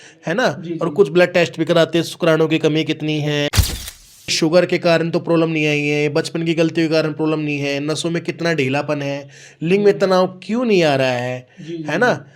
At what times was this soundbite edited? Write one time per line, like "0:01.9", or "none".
none